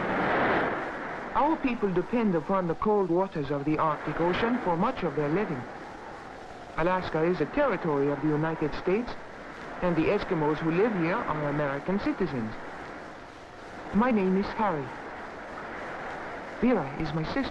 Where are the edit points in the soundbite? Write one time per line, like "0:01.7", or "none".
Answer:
0:06.9